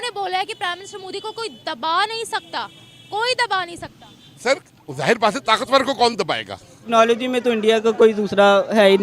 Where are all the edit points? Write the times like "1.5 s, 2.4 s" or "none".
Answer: 6.9 s